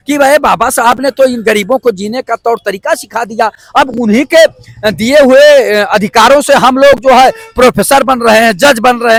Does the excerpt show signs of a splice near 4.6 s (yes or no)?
no